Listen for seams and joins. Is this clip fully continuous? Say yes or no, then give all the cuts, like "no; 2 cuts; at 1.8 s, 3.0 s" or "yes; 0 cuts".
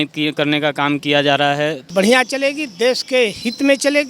no; 1 cut; at 1.8 s